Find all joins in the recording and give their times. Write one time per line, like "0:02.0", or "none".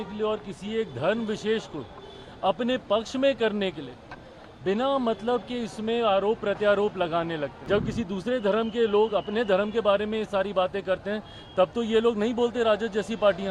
0:07.5